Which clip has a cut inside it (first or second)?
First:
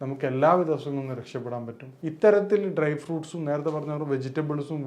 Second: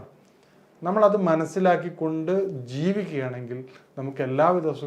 first